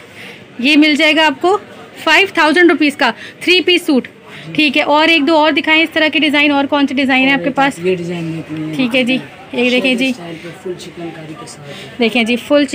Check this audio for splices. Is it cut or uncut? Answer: uncut